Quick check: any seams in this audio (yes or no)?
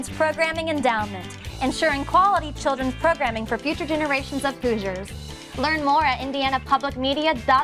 no